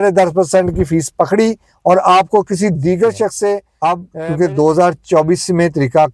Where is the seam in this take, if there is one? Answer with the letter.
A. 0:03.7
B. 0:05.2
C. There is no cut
A